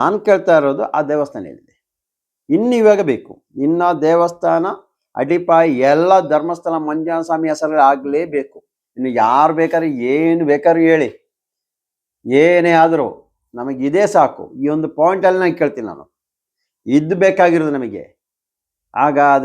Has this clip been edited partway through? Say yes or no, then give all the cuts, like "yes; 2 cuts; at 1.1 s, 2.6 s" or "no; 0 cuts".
no; 0 cuts